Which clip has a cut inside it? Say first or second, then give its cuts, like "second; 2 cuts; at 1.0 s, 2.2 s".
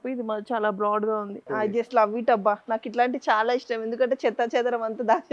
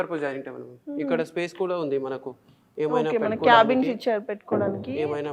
first; 1 cut; at 1.4 s